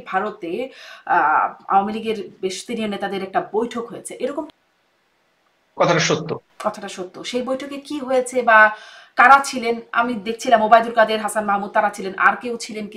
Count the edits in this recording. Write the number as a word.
one